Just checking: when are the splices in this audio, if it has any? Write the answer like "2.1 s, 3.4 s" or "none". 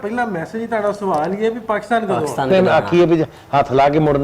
2.5 s